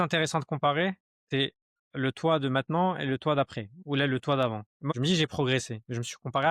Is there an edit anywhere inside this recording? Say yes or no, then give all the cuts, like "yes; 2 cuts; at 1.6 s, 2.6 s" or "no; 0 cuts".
yes; 2 cuts; at 1.1 s, 4.9 s